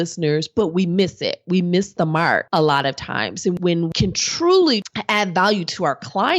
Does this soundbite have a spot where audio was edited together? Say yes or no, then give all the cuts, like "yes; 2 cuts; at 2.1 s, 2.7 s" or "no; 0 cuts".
yes; 3 cuts; at 2.5 s, 3.6 s, 4.9 s